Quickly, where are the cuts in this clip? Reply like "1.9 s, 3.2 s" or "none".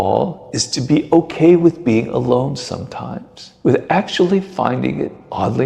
none